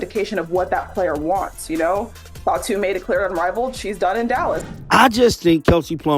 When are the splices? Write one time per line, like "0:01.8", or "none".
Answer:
0:04.7